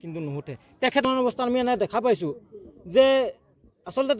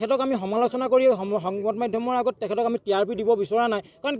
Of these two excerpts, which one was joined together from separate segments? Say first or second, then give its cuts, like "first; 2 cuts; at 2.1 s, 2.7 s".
first; 1 cut; at 1.0 s